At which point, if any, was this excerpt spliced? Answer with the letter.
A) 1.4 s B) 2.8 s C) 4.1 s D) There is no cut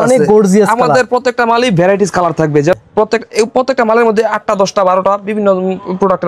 B